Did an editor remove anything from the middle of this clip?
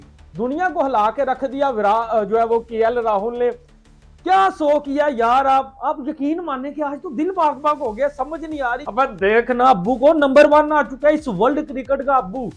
yes; 1 cut; at 8.8 s

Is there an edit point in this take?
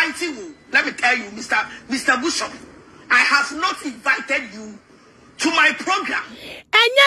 no; 0 cuts

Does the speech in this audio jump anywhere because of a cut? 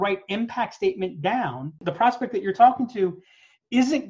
yes; 1 cut; at 1.8 s

